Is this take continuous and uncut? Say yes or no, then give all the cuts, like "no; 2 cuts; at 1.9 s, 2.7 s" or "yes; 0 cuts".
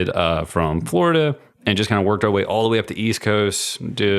yes; 0 cuts